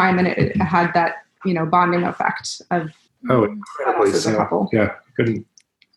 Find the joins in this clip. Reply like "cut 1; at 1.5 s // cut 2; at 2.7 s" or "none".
cut 1; at 3.1 s